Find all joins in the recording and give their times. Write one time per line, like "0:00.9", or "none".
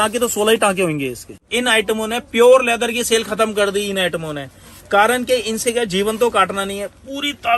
0:01.4